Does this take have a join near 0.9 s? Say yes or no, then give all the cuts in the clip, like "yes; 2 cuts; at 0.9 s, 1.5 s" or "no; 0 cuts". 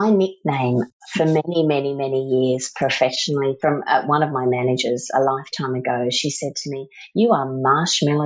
yes; 1 cut; at 0.9 s